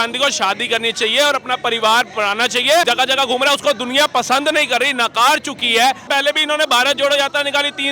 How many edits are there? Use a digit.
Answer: 2